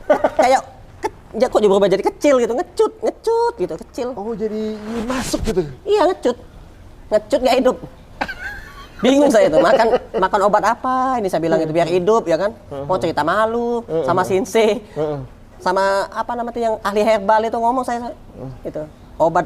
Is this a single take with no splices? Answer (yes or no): yes